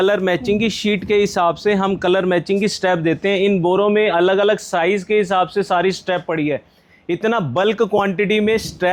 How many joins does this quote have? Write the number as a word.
zero